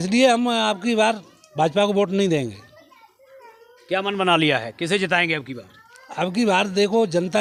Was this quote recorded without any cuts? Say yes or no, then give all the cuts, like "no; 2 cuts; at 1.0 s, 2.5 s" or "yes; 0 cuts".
yes; 0 cuts